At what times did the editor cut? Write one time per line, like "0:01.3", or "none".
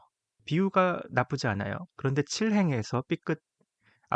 none